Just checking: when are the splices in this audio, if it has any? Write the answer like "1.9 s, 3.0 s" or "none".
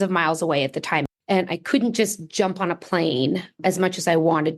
1.1 s, 3.6 s